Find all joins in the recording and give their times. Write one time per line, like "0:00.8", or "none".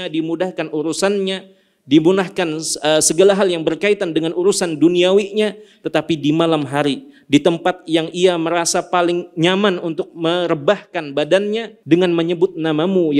0:11.7